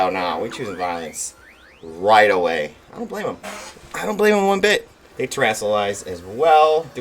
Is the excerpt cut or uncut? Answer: cut